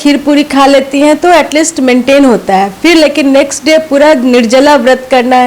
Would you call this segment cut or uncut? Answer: uncut